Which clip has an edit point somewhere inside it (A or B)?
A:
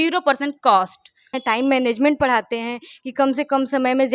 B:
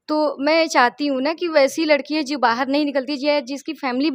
A